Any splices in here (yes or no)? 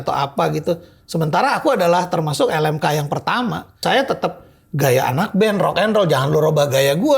yes